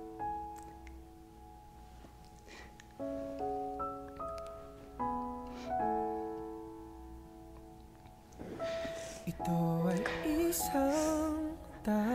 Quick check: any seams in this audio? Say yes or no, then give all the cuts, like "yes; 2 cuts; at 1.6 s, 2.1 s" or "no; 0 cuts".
no; 0 cuts